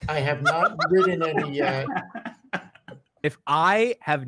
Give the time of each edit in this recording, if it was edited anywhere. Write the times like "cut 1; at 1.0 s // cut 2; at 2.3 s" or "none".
cut 1; at 3.2 s